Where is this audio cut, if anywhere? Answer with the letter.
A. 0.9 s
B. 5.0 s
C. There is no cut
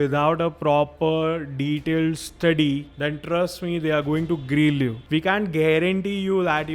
B